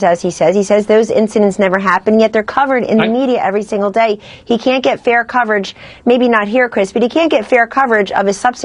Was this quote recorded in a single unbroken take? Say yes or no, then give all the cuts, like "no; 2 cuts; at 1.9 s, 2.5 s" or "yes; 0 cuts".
yes; 0 cuts